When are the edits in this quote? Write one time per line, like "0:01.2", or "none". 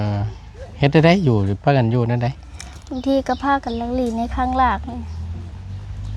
none